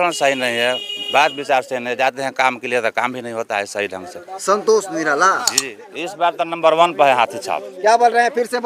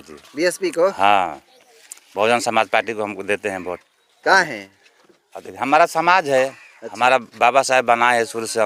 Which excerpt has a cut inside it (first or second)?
first